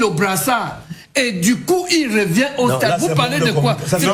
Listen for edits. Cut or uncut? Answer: uncut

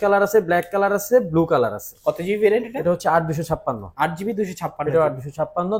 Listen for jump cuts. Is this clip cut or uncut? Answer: uncut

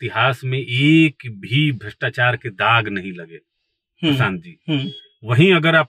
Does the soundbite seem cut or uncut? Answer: uncut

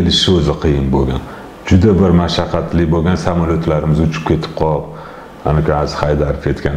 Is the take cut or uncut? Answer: uncut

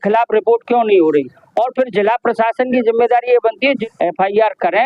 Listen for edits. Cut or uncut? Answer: cut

